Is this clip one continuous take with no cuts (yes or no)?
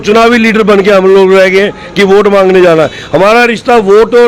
yes